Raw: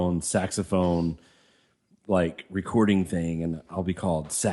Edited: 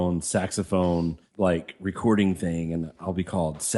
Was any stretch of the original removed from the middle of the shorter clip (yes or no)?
yes